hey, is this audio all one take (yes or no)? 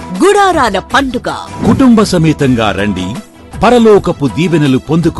yes